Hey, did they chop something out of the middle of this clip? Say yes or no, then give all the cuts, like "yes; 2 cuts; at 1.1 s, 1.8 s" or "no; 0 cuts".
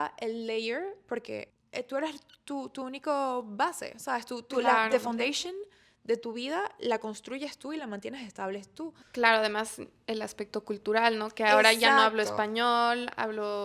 yes; 2 cuts; at 1.6 s, 9.0 s